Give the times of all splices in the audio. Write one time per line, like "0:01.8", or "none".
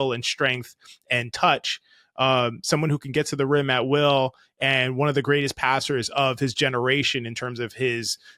none